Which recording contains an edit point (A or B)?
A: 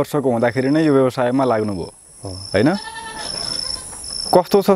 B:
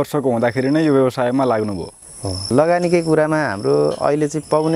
B